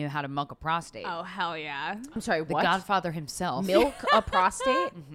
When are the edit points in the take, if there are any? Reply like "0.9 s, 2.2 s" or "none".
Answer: none